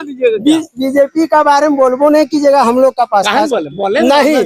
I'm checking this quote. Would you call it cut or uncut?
uncut